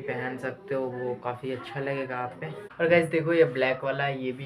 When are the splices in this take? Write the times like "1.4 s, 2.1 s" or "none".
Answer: 2.6 s